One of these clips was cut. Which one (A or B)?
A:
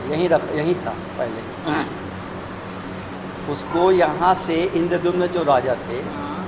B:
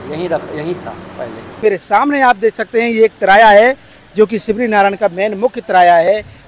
B